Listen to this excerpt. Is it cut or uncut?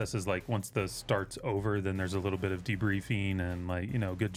uncut